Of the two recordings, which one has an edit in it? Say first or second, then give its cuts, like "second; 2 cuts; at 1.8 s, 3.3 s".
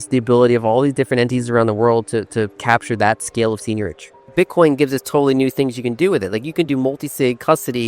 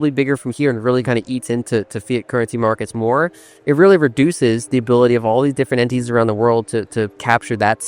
first; 1 cut; at 4.3 s